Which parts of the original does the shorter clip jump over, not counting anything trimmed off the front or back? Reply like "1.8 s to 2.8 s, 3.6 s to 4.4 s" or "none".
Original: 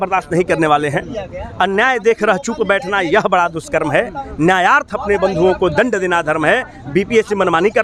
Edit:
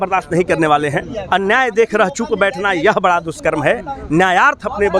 1.2 s to 1.4 s